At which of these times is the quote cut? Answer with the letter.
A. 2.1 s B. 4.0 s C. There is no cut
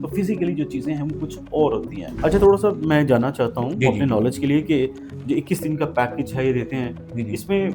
A